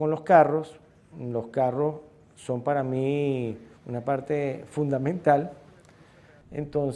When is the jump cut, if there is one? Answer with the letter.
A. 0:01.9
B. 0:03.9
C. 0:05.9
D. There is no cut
B